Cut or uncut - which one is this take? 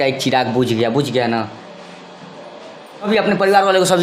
uncut